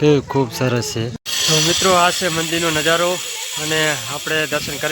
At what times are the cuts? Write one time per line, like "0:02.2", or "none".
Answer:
0:01.4